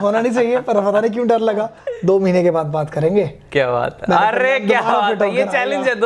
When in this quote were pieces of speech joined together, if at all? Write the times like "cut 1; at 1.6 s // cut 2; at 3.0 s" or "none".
cut 1; at 1.7 s